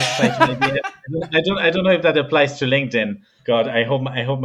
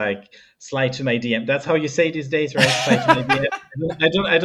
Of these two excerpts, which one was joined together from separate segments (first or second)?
first